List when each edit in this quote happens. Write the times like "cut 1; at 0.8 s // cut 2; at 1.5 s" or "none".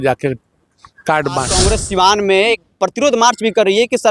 cut 1; at 1.6 s